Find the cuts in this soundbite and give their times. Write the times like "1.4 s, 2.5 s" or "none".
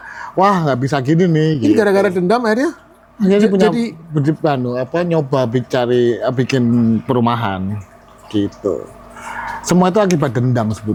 none